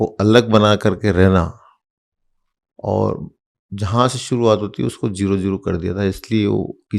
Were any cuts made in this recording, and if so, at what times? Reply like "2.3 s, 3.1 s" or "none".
none